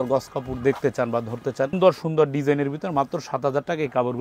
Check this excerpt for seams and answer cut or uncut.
cut